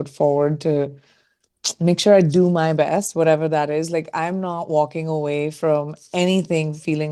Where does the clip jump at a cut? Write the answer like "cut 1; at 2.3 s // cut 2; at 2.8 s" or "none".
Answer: none